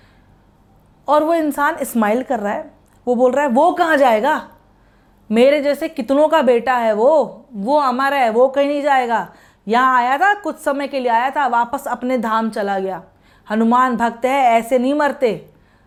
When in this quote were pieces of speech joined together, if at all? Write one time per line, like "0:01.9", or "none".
none